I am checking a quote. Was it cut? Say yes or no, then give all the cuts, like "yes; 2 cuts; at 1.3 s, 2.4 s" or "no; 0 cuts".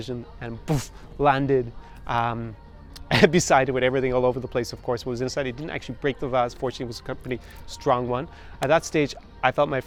no; 0 cuts